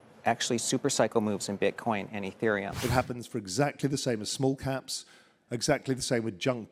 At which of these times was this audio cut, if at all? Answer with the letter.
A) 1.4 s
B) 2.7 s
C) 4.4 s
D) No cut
B